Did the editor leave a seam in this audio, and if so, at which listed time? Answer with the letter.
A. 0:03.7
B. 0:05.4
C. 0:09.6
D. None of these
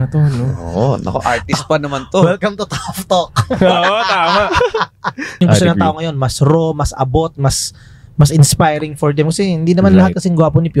B